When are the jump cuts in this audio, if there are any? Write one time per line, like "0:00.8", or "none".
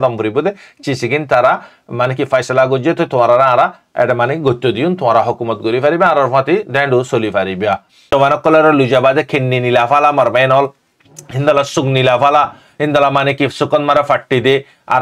0:08.1